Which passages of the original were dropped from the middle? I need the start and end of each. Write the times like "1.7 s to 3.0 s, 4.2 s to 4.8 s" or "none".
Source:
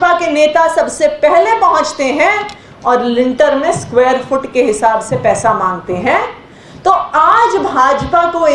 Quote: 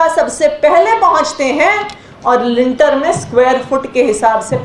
none